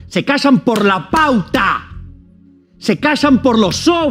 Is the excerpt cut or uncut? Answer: uncut